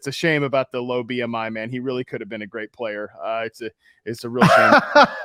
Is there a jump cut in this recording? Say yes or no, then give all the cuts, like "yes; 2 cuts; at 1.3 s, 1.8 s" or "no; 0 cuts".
no; 0 cuts